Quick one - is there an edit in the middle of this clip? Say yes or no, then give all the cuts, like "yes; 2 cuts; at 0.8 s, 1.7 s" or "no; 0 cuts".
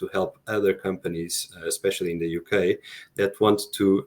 no; 0 cuts